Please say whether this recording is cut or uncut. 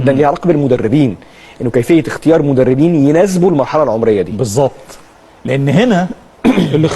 cut